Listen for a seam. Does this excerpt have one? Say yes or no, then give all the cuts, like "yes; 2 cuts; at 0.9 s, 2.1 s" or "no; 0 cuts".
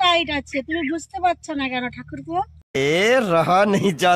no; 0 cuts